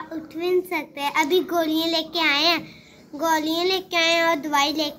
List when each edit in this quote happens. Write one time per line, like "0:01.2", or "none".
none